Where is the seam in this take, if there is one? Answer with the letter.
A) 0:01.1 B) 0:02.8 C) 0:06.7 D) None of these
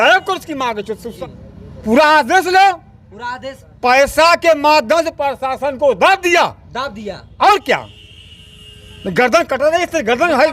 A